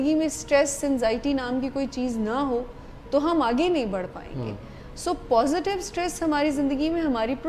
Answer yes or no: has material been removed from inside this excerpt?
no